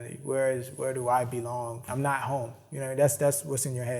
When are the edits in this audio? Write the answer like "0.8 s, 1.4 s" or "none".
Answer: 1.9 s